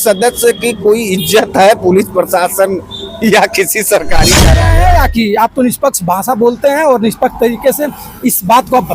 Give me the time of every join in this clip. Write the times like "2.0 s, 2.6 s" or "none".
4.5 s